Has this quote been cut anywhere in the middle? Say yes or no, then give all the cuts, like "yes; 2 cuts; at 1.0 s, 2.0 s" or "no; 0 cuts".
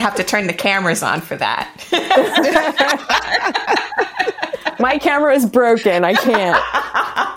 no; 0 cuts